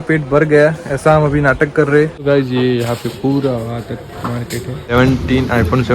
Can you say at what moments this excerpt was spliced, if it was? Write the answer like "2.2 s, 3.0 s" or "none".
2.2 s, 4.9 s